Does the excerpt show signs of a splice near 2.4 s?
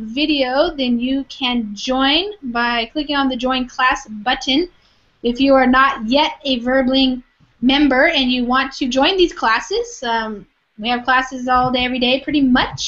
no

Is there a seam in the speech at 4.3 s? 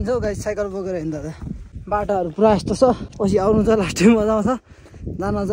no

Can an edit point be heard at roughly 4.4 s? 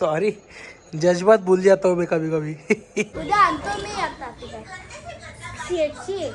no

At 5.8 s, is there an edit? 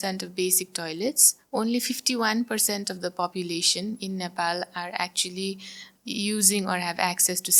no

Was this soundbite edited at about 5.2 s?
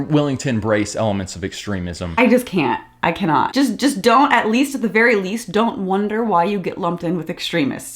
no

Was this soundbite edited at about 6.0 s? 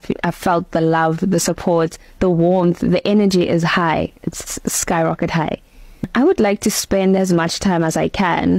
yes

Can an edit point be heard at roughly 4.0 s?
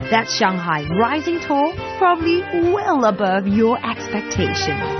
yes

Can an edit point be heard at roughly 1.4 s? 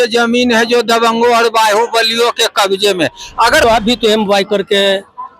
no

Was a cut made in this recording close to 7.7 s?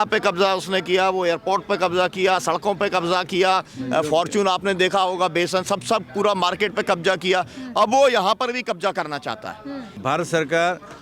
no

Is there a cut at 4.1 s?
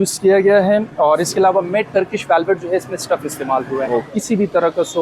yes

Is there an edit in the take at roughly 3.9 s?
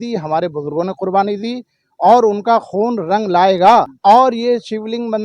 yes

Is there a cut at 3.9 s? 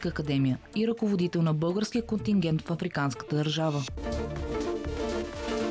yes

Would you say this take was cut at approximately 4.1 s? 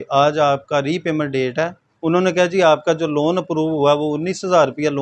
no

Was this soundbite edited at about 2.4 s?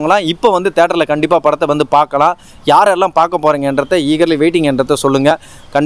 no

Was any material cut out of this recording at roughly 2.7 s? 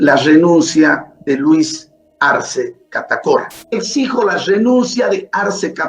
no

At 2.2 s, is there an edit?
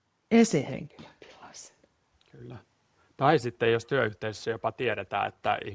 yes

